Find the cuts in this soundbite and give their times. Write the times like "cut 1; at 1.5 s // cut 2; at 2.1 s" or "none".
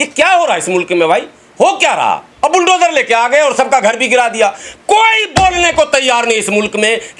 cut 1; at 2.3 s